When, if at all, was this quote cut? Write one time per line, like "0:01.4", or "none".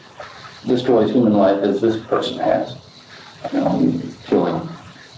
none